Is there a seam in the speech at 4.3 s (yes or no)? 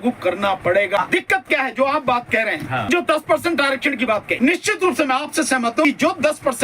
yes